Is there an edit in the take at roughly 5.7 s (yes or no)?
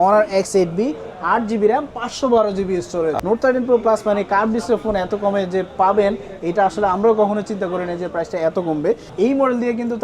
no